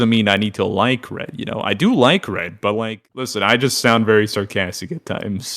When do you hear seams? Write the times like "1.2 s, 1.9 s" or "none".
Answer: 3.0 s